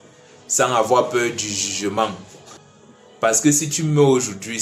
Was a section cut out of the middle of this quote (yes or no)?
no